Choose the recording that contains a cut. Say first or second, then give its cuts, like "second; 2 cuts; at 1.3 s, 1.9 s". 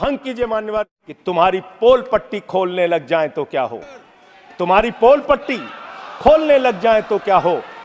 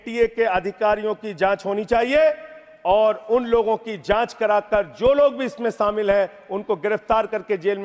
first; 1 cut; at 1.1 s